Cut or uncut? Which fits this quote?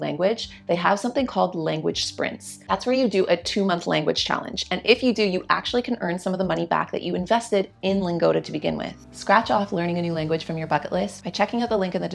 cut